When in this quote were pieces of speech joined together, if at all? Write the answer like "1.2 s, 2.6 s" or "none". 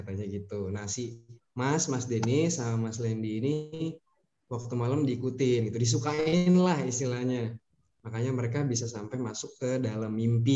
none